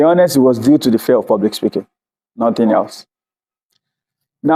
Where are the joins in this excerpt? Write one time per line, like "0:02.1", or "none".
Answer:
none